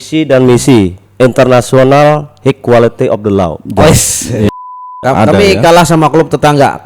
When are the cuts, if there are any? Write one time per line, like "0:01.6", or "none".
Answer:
0:04.5